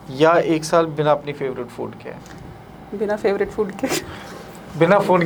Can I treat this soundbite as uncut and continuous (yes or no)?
yes